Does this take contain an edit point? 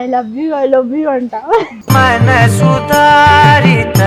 yes; 1 cut; at 1.7 s

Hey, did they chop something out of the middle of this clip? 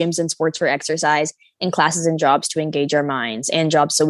no; 0 cuts

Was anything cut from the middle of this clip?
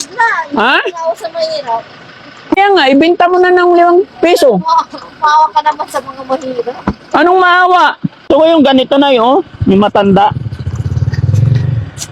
yes; 2 cuts; at 2.6 s, 8.3 s

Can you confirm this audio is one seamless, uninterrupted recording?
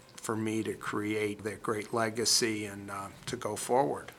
no; 1 cut; at 1.4 s

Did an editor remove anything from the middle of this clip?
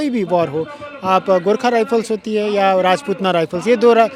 no; 0 cuts

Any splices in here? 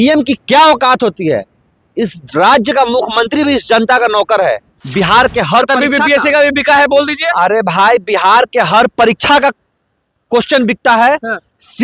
yes; 1 cut; at 4.8 s

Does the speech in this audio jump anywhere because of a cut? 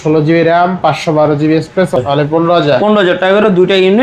yes; 1 cut; at 2.0 s

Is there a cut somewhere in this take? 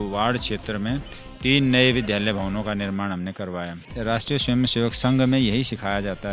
yes; 1 cut; at 3.8 s

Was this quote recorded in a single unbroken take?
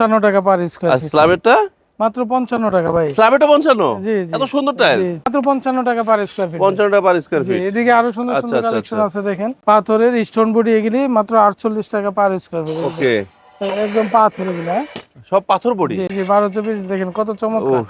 no; 3 cuts; at 5.3 s, 9.5 s, 16.1 s

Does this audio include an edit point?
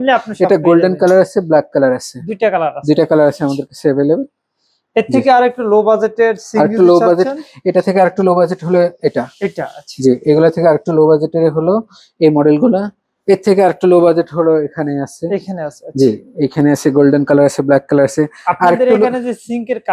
no; 0 cuts

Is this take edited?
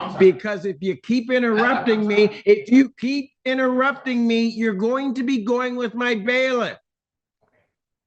no; 0 cuts

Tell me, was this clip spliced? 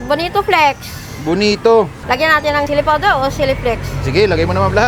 no; 0 cuts

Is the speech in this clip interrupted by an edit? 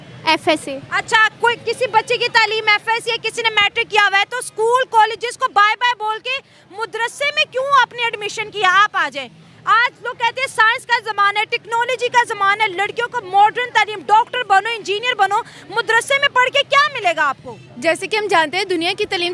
no; 0 cuts

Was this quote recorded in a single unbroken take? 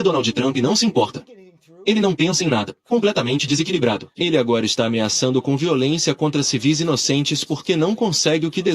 no; 2 cuts; at 2.7 s, 4.1 s

